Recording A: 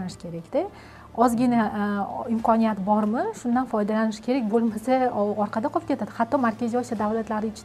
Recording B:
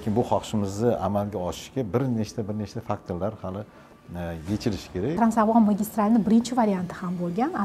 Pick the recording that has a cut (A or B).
B